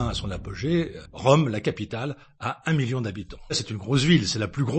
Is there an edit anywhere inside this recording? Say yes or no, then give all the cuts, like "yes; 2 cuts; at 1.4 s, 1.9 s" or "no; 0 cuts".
yes; 2 cuts; at 1.0 s, 3.6 s